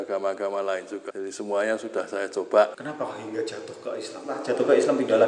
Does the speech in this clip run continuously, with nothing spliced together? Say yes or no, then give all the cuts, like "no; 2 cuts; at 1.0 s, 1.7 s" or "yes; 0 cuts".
no; 3 cuts; at 1.1 s, 2.8 s, 4.4 s